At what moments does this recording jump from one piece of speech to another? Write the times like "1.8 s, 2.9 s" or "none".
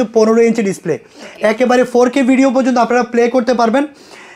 none